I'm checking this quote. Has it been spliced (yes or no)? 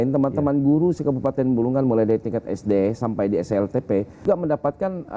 yes